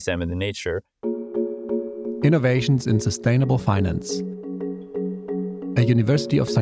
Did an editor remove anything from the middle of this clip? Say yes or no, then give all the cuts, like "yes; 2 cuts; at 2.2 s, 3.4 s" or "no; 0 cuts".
yes; 1 cut; at 0.9 s